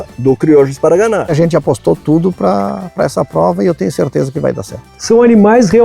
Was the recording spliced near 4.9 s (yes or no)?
yes